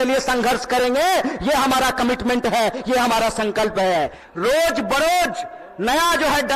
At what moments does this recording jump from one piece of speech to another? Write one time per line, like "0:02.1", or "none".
0:04.2